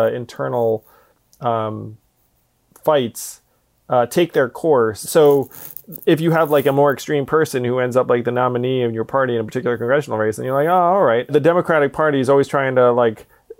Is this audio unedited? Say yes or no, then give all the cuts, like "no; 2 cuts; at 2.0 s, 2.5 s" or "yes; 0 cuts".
no; 2 cuts; at 5.0 s, 11.3 s